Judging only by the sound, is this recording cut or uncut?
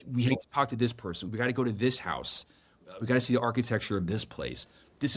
cut